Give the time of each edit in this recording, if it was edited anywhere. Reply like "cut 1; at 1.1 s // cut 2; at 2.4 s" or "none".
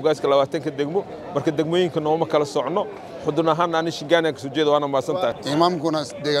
cut 1; at 5.3 s